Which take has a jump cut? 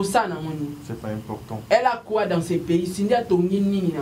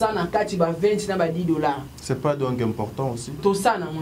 second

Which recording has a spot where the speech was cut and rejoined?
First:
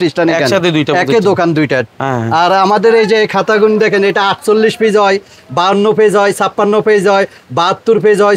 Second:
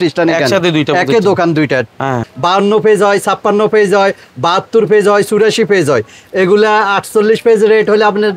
second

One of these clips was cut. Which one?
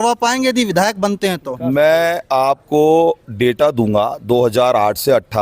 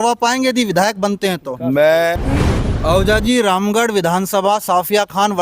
second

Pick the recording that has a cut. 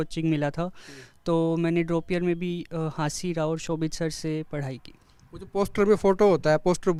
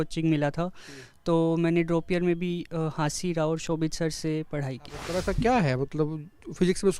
second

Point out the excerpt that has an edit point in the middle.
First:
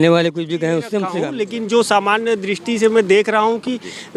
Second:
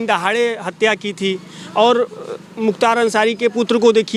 first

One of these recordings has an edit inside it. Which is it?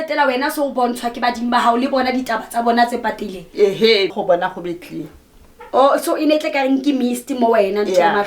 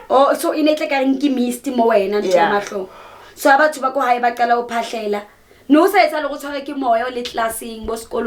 first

